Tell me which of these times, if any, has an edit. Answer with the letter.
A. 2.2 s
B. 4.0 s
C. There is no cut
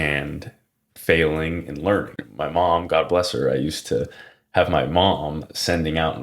A